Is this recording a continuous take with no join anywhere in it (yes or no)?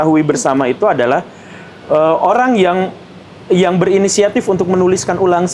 yes